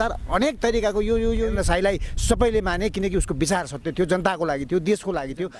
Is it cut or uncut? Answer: cut